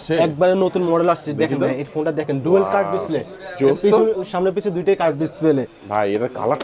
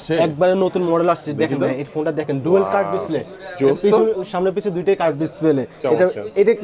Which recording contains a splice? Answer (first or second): first